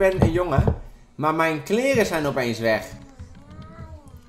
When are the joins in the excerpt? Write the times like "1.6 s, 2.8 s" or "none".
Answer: none